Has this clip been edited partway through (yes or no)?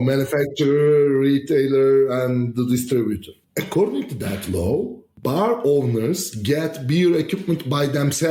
yes